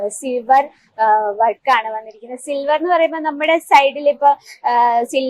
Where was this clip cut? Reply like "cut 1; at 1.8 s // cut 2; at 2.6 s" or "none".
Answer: none